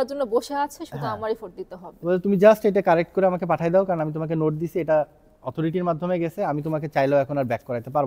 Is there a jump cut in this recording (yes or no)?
no